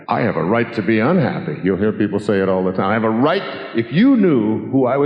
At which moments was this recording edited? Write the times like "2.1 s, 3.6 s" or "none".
none